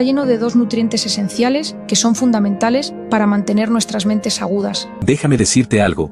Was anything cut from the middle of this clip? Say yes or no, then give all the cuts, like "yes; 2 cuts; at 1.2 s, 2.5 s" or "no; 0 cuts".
yes; 1 cut; at 4.9 s